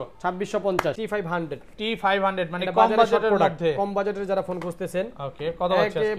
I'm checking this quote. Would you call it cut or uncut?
cut